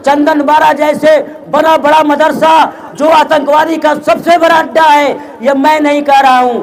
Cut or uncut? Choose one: uncut